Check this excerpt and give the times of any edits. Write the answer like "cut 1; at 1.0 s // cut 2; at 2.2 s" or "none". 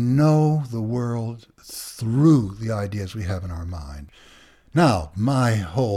cut 1; at 4.0 s